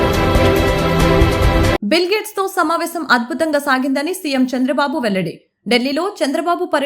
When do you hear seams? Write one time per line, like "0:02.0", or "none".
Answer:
0:01.8